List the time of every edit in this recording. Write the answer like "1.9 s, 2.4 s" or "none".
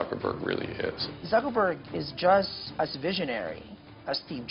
1.1 s, 2.6 s